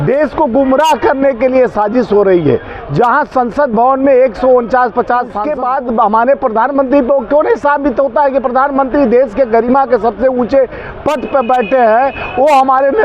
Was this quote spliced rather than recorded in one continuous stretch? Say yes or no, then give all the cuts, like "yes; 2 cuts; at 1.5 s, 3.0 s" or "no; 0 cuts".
yes; 1 cut; at 5.5 s